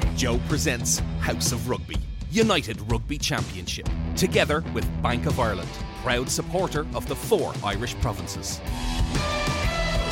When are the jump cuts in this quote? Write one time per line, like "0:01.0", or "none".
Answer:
none